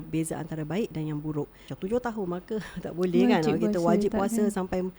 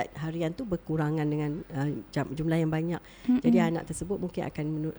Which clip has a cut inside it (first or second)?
first